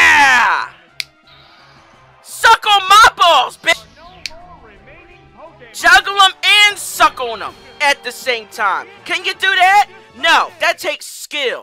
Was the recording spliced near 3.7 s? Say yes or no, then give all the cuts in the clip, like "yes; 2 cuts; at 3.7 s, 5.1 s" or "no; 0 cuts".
yes; 1 cut; at 3.7 s